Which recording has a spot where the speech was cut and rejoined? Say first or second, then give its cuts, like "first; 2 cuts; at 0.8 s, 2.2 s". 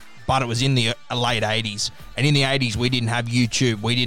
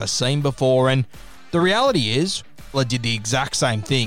second; 1 cut; at 2.7 s